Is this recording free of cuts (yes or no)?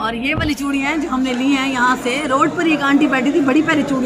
yes